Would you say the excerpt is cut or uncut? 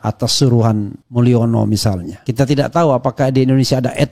cut